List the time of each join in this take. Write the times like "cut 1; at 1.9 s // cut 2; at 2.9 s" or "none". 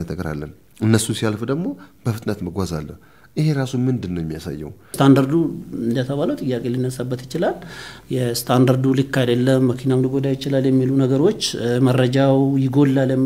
cut 1; at 4.9 s